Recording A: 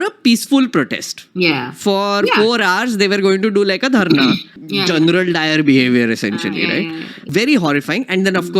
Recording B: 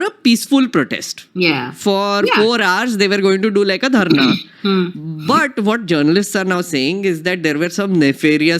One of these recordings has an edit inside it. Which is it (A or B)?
A